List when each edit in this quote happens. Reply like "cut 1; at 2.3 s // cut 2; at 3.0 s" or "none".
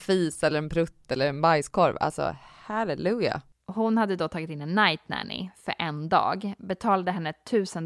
cut 1; at 3.5 s